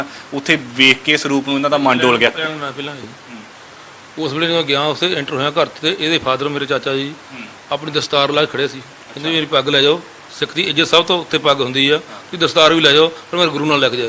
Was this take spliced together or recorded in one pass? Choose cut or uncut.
uncut